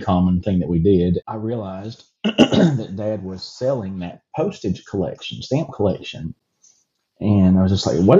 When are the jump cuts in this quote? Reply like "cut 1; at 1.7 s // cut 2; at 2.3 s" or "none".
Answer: cut 1; at 1.2 s